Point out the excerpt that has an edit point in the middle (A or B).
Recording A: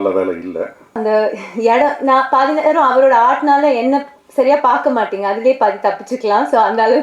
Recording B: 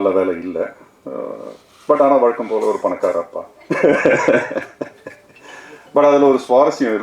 A